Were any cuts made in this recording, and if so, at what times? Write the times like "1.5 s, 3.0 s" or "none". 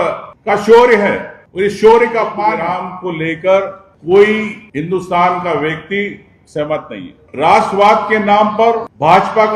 2.6 s